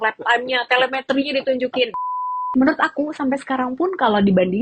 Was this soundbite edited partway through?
yes; 1 cut; at 2.5 s

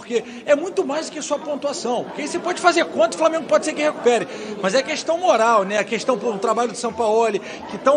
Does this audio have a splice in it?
no; 0 cuts

